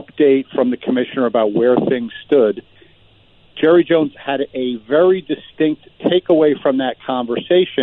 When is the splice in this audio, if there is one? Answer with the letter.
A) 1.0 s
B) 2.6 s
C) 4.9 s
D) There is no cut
D